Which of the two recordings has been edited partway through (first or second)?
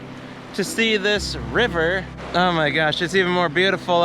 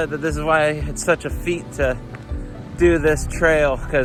first